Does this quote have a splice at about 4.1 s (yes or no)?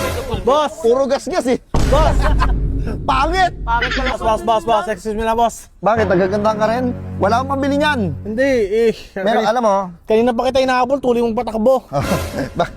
yes